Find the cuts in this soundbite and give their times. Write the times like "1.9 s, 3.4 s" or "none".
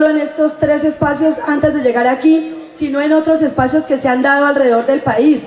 none